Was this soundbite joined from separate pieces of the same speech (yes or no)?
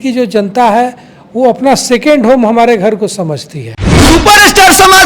yes